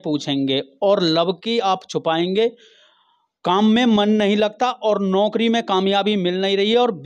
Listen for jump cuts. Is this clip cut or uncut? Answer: uncut